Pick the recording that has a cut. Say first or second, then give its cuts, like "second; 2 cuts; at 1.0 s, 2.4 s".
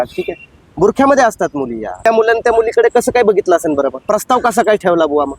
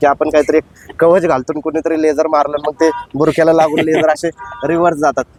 first; 2 cuts; at 2.0 s, 4.0 s